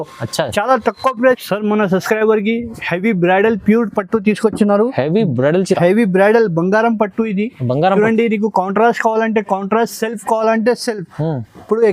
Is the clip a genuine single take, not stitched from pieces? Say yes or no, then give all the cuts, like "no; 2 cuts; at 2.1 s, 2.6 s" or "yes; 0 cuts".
no; 1 cut; at 1.2 s